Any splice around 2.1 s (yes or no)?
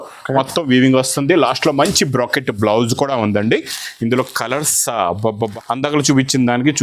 no